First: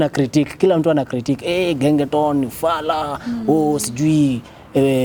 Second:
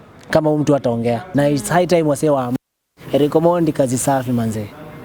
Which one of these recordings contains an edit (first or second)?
second